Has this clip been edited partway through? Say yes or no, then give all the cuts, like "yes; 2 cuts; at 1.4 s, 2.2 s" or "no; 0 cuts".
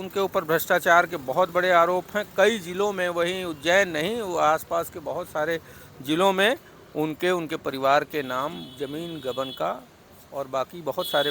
no; 0 cuts